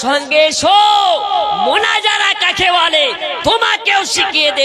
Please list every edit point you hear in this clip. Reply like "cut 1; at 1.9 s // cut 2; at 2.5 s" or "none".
none